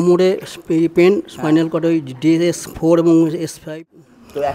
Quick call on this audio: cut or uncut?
cut